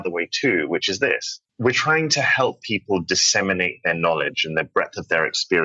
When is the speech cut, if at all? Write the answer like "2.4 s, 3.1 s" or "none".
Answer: 1.4 s